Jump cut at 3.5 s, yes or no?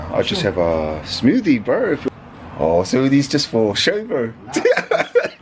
no